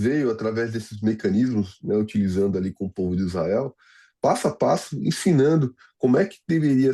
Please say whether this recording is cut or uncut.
uncut